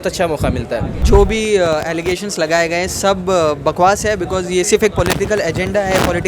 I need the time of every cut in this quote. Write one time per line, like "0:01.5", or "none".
0:01.0